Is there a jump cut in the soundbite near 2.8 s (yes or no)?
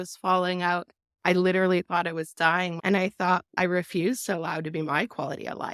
yes